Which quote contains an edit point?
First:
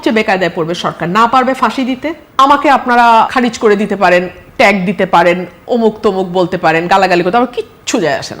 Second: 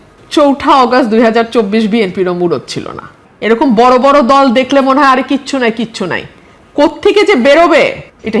first; 2 cuts; at 2.2 s, 3.3 s

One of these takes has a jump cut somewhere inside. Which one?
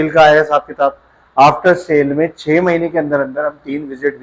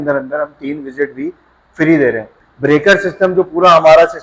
second; 1 cut; at 2.3 s

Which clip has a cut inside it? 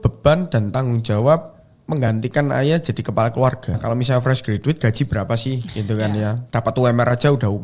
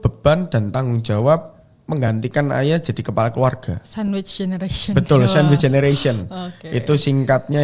first; 2 cuts; at 3.8 s, 6.4 s

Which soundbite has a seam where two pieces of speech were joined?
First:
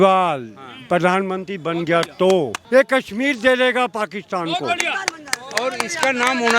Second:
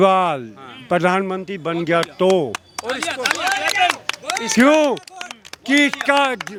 first; 1 cut; at 2.6 s

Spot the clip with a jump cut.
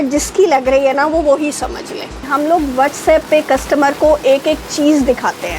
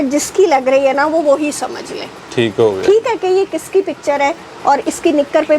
first; 1 cut; at 2.3 s

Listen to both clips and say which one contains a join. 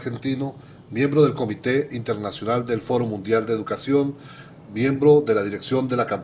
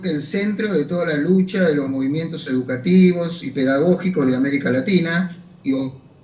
second; 1 cut; at 4.6 s

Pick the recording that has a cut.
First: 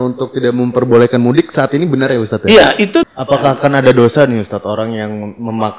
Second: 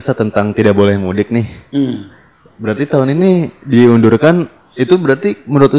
first; 1 cut; at 3.1 s

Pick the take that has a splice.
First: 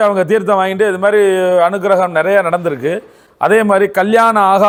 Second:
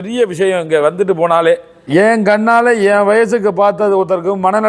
second; 1 cut; at 1.7 s

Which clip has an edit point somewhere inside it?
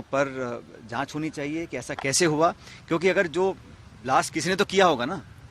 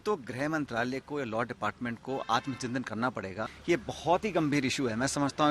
second; 1 cut; at 3.5 s

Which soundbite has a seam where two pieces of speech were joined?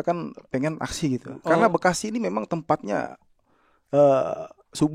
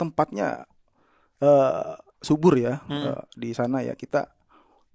first; 1 cut; at 1.4 s

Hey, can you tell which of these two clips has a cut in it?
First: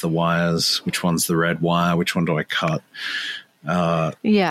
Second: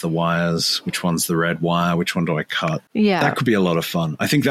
second; 1 cut; at 2.9 s

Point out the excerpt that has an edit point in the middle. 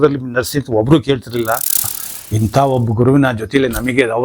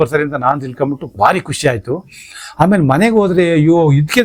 first; 1 cut; at 1.9 s

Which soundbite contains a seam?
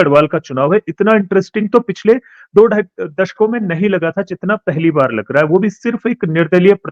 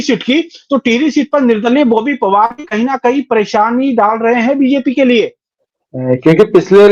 second; 1 cut; at 5.4 s

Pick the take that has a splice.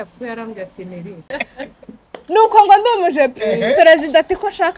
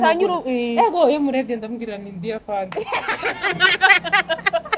first; 1 cut; at 1.3 s

